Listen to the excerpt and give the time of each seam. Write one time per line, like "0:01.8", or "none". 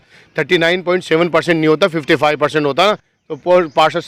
none